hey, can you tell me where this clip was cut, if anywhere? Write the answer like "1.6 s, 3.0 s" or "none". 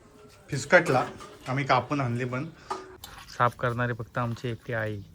2.9 s